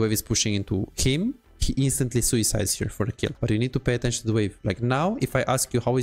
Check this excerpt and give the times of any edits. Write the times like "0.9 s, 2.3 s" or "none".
1.5 s, 3.4 s